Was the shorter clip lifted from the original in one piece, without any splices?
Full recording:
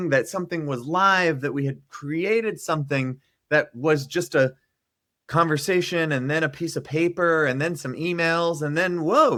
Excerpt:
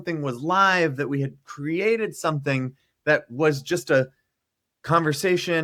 yes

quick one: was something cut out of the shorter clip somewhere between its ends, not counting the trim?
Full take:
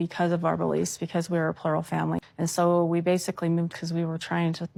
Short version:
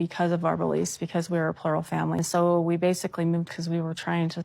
yes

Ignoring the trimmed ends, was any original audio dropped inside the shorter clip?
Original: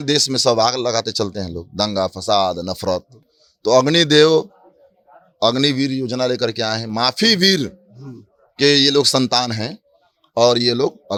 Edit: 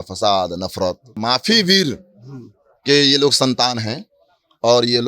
yes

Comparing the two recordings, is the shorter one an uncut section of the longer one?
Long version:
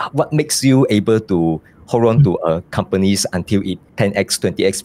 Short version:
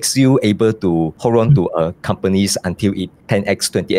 no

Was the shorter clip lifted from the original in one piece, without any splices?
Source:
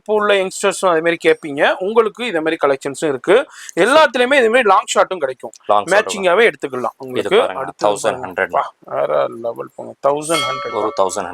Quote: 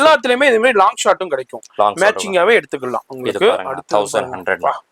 yes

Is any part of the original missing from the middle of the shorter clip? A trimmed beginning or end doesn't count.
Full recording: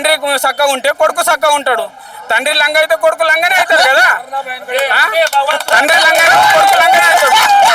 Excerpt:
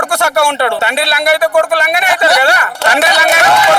yes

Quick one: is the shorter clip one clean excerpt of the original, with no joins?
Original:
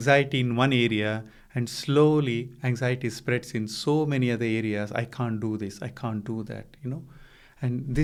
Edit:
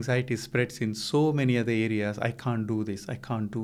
yes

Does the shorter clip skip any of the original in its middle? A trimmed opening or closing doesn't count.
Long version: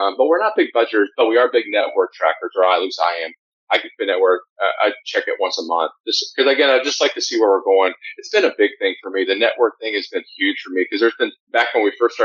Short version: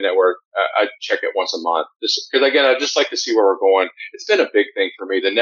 no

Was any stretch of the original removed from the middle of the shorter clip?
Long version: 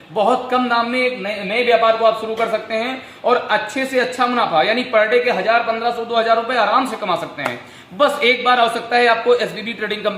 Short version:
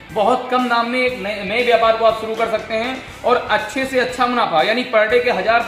no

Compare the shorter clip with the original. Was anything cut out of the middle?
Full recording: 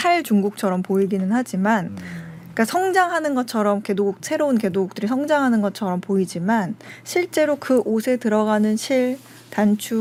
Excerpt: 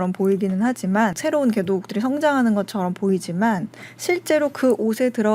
yes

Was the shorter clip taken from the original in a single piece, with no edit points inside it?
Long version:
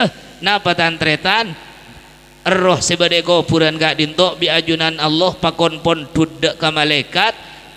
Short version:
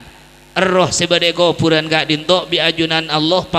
yes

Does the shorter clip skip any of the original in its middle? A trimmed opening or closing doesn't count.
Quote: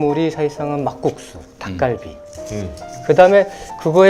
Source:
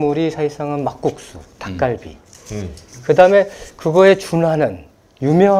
no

